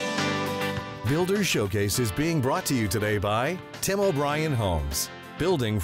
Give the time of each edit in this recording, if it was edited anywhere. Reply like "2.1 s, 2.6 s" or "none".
1.0 s